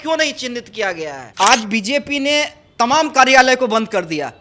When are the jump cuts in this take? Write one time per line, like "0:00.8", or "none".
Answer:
0:01.2